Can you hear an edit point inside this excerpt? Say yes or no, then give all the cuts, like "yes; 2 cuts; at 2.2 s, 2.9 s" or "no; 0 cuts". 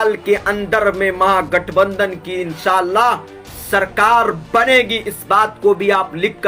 no; 0 cuts